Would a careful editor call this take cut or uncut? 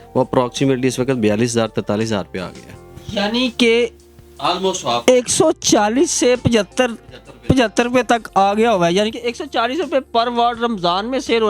uncut